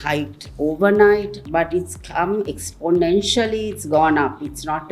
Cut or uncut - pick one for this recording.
cut